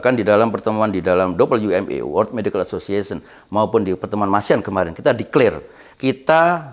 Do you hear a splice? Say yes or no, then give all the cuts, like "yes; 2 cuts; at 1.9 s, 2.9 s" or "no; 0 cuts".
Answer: no; 0 cuts